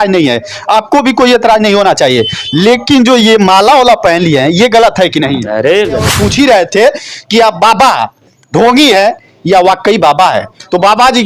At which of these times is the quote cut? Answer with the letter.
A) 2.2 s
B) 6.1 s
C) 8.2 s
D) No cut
B